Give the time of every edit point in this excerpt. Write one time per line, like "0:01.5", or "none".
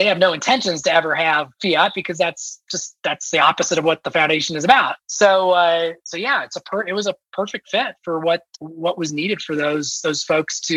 0:08.5